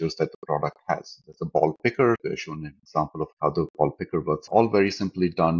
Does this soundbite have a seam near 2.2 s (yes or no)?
yes